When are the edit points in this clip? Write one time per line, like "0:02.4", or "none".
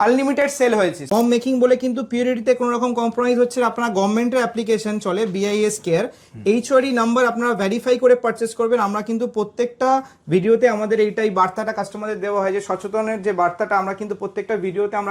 0:01.0